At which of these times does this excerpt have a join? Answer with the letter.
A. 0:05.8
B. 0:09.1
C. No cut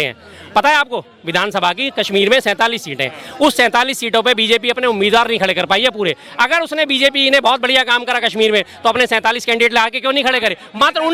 C